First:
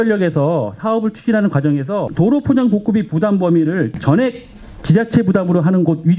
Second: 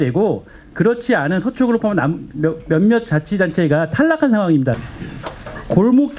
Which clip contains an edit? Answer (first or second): first